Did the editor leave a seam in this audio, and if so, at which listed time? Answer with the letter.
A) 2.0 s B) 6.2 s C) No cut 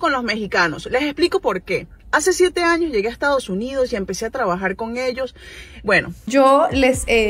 B